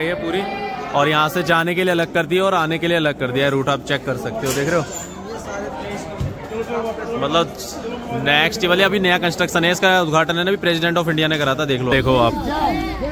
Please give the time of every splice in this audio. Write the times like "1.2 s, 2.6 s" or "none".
11.9 s